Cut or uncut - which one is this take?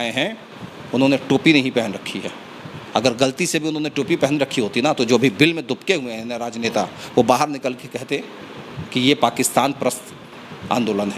uncut